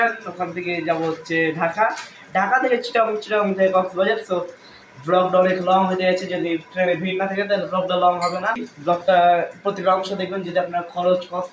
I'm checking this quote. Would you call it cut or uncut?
cut